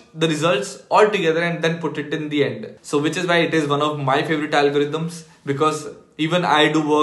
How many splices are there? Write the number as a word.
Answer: one